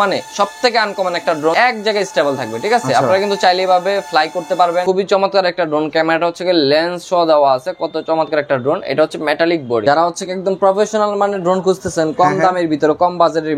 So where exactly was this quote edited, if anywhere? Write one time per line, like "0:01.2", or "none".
0:01.5
0:04.8
0:09.8